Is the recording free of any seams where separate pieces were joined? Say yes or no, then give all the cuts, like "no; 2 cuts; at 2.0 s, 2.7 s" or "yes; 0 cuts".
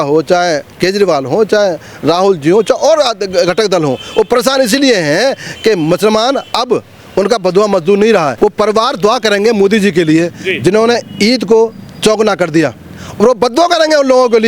no; 1 cut; at 8.3 s